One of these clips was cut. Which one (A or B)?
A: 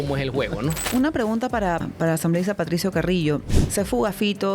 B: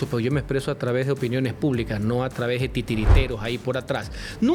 A